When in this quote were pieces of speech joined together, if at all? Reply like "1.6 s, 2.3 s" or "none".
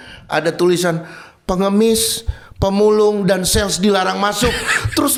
none